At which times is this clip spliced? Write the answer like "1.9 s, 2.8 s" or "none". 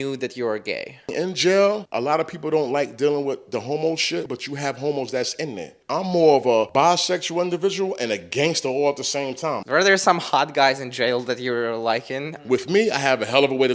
1.1 s, 1.9 s, 4.3 s, 5.7 s, 6.7 s, 9.6 s, 12.4 s